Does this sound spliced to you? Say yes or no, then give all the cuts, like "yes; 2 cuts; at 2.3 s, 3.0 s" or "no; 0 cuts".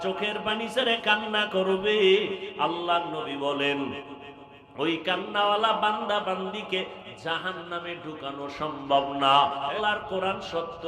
yes; 1 cut; at 9.7 s